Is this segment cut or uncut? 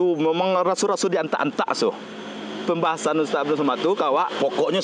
uncut